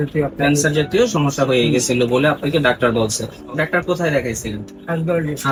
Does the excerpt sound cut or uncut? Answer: uncut